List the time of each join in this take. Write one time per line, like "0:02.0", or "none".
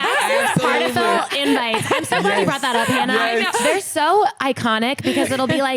0:03.6